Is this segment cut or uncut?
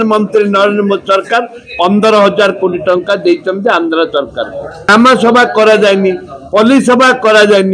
cut